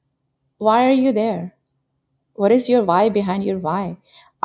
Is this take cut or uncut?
uncut